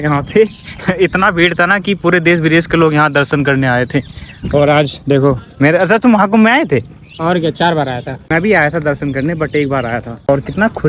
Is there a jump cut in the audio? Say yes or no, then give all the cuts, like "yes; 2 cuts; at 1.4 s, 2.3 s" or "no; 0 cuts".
no; 0 cuts